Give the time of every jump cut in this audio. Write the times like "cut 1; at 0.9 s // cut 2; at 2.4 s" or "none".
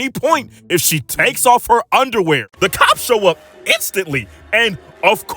cut 1; at 2.6 s